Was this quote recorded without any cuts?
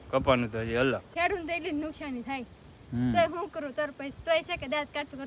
no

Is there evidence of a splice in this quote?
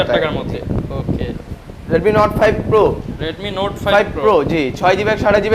no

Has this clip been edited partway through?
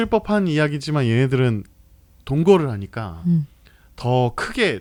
no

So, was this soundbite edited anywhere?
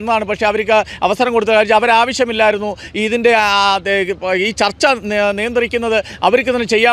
no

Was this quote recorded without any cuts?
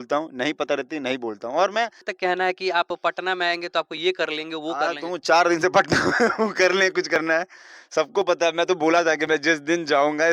no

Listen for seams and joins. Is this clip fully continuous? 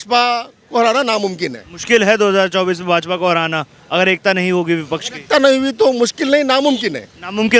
yes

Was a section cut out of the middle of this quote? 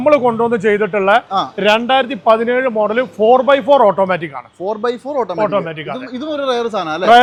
no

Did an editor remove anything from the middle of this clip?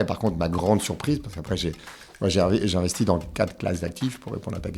no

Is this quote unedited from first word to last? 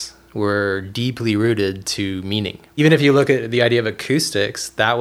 no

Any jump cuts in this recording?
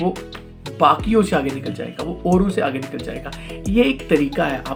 no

